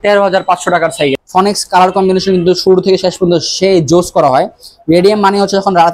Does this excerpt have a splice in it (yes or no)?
yes